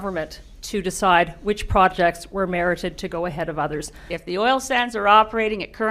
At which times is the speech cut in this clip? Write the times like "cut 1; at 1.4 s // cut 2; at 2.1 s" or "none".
cut 1; at 4.0 s